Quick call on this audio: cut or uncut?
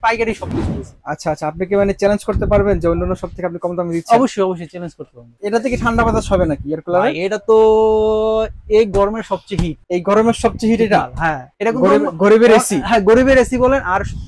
cut